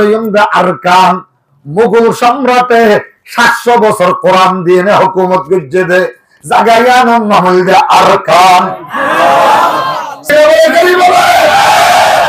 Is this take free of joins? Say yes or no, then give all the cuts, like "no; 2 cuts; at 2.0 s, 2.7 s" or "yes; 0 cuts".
no; 1 cut; at 10.2 s